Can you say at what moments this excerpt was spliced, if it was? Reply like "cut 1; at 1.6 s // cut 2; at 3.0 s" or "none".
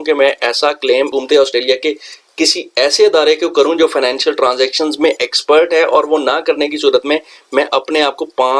none